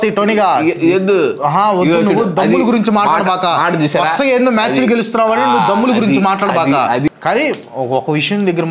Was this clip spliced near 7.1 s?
yes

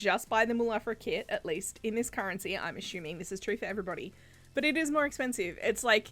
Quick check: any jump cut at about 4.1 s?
no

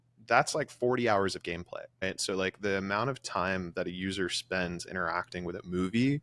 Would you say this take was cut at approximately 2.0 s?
yes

